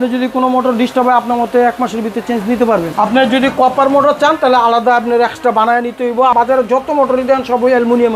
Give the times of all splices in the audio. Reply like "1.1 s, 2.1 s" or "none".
2.9 s, 6.3 s